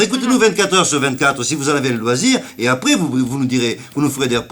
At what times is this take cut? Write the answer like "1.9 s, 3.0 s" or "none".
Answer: none